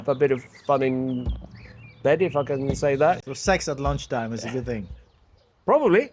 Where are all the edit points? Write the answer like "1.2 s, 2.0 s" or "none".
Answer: 3.2 s